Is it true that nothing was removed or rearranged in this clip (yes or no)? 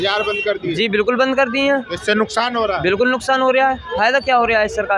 yes